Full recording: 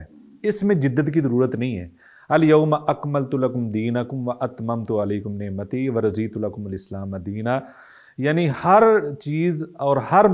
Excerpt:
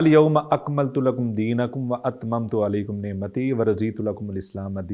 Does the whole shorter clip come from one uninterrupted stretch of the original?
yes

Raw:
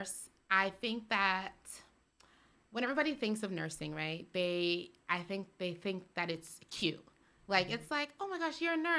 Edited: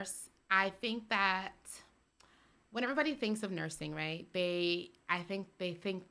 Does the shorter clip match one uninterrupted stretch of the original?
yes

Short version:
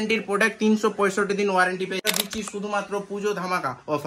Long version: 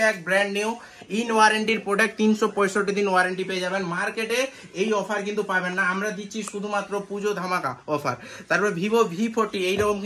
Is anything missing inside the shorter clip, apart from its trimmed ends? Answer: yes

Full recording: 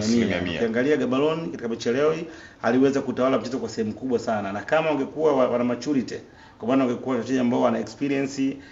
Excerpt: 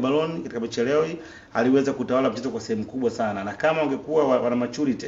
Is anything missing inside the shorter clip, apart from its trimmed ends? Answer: no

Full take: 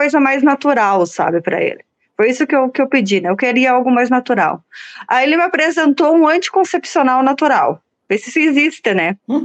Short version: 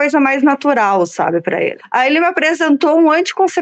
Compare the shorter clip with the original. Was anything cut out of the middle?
yes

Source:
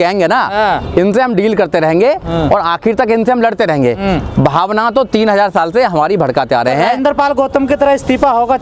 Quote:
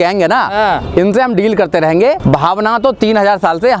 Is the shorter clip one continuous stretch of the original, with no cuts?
no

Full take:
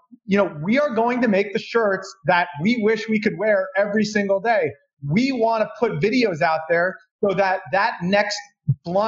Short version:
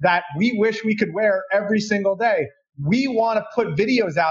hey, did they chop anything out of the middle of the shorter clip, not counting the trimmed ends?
no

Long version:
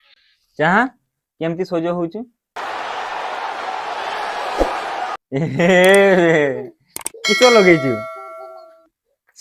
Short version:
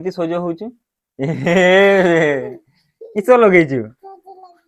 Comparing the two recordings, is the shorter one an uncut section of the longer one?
no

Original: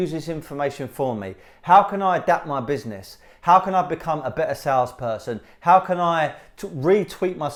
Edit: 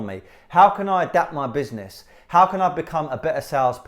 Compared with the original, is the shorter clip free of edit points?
yes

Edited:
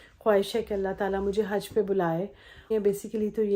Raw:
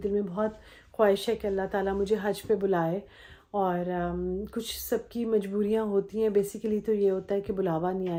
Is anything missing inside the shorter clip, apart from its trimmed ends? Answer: yes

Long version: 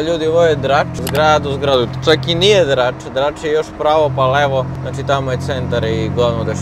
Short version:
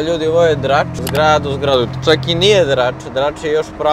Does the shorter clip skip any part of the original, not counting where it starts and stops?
no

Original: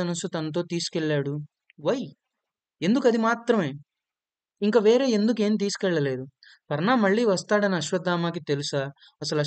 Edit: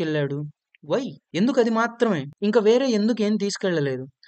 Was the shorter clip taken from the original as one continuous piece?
no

